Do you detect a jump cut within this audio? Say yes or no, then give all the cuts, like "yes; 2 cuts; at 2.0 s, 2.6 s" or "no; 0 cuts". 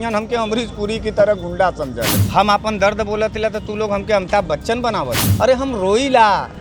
yes; 2 cuts; at 2.2 s, 5.2 s